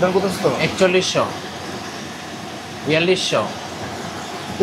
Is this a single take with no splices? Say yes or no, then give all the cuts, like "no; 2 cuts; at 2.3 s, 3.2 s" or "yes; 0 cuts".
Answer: yes; 0 cuts